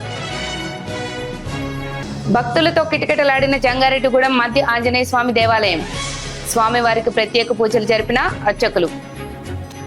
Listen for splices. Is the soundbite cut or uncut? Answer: uncut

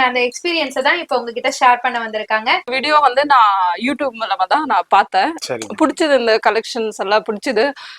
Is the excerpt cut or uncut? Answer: cut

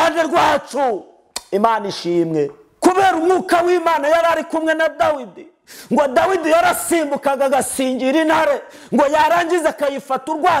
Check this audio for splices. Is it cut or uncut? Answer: cut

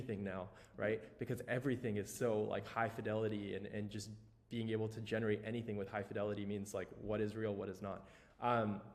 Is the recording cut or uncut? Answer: uncut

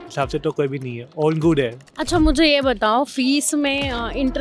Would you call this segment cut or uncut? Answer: cut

